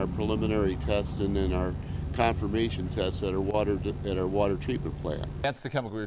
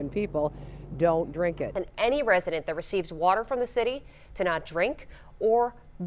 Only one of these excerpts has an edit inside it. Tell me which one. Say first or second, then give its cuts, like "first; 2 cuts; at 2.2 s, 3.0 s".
second; 1 cut; at 1.8 s